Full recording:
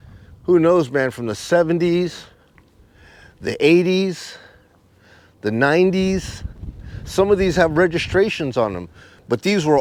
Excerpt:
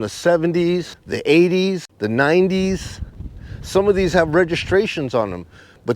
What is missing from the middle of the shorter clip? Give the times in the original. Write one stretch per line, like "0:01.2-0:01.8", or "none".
0:02.3-0:03.3
0:04.2-0:05.3